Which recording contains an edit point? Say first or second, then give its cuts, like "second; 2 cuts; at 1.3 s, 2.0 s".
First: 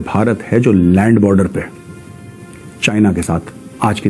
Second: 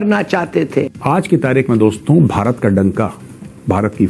second; 1 cut; at 1.0 s